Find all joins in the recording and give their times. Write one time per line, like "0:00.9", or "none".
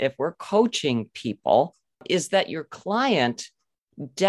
0:02.0